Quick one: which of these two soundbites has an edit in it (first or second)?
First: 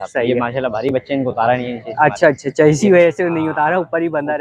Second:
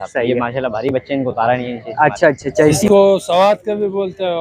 second